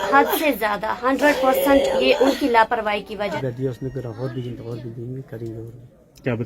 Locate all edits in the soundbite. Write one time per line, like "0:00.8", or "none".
0:03.3